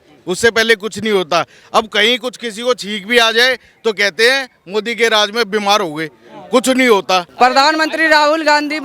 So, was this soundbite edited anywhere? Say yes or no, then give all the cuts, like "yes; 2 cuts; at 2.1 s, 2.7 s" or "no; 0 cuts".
yes; 1 cut; at 7.3 s